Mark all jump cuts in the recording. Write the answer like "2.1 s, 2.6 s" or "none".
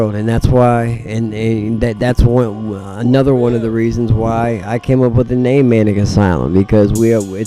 none